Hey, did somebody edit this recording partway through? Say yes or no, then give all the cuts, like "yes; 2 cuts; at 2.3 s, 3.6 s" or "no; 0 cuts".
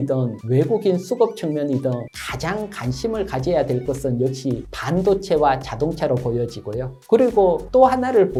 no; 0 cuts